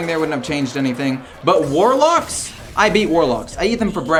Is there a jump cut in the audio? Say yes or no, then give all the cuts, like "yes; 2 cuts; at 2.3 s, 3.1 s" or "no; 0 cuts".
no; 0 cuts